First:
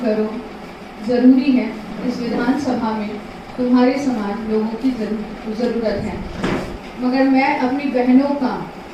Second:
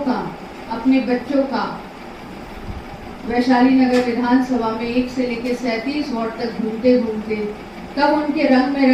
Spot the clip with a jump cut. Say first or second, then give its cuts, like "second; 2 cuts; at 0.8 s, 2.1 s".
first; 1 cut; at 6.8 s